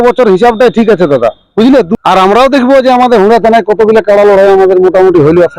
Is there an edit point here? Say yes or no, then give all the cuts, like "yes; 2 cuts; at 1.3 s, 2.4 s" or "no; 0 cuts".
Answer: yes; 1 cut; at 1.9 s